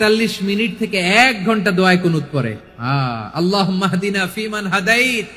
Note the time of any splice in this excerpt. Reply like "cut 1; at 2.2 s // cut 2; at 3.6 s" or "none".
cut 1; at 2.6 s